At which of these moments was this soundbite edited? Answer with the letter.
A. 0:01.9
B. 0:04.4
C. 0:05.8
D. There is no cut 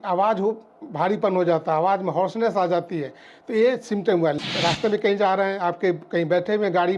B